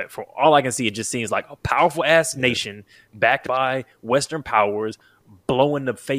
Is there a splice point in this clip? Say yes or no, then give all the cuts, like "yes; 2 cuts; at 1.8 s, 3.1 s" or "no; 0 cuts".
no; 0 cuts